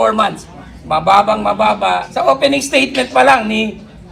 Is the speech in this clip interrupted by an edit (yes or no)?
yes